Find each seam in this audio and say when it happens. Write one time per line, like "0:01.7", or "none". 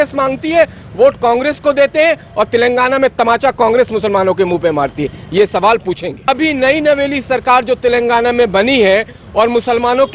0:06.3

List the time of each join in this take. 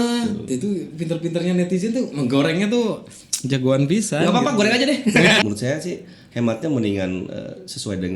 0:05.4

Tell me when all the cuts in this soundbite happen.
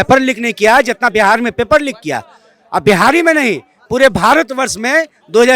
none

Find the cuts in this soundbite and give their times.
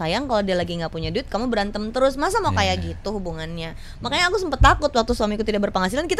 none

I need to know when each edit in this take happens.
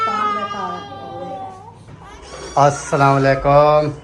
0:02.1

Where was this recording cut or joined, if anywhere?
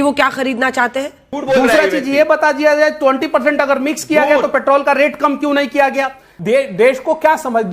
0:01.3
0:06.3

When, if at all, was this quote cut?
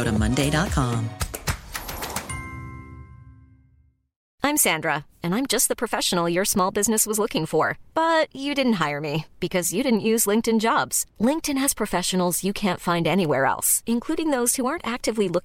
0:04.2

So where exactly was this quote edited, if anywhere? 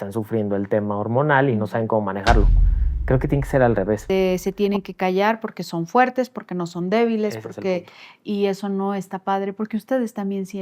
0:04.0

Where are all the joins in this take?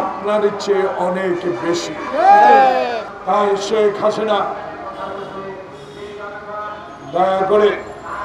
0:03.1

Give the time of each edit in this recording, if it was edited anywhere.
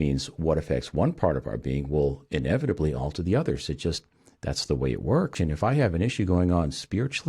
0:05.3

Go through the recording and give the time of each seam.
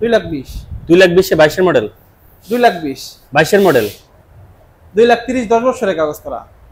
none

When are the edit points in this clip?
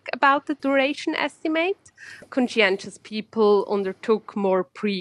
0:02.3

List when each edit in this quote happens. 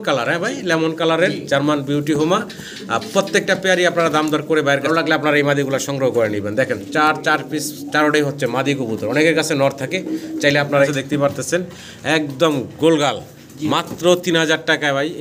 0:04.9
0:10.9

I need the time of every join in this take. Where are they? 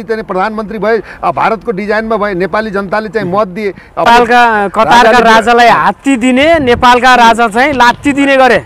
0:04.1

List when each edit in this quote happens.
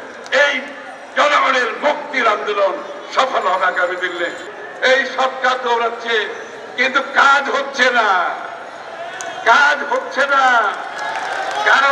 0:04.4

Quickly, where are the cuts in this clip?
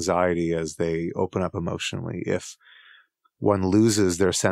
none

